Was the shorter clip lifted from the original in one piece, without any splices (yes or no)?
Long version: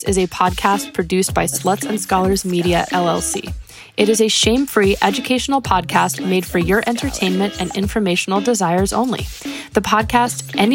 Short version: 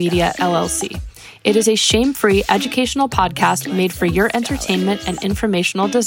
yes